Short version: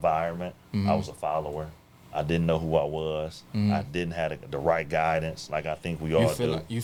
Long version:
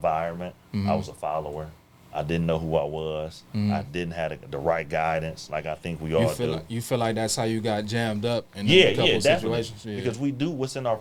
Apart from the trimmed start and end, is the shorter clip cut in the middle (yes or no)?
no